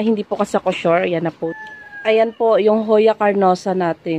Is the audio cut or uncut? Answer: cut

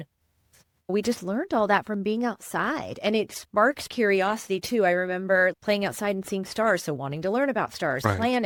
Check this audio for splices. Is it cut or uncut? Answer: uncut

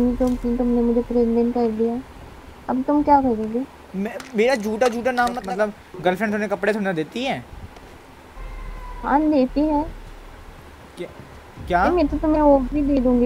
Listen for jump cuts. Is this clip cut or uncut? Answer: cut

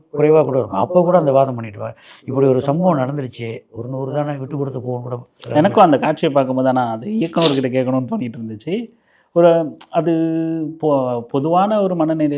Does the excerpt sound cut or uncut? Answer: uncut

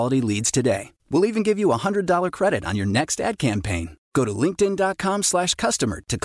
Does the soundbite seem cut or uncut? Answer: uncut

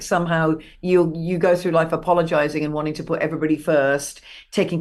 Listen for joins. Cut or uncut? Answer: uncut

